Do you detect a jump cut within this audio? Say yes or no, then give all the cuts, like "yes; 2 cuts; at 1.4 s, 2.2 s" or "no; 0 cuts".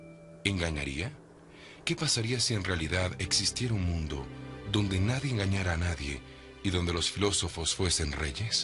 no; 0 cuts